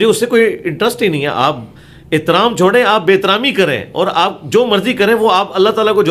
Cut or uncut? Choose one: uncut